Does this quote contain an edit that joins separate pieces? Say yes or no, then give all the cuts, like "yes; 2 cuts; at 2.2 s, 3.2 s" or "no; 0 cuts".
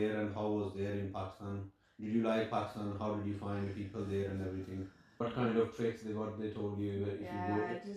yes; 1 cut; at 5.0 s